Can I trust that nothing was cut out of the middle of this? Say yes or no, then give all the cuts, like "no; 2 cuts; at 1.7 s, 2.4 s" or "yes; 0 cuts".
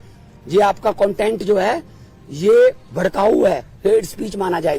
yes; 0 cuts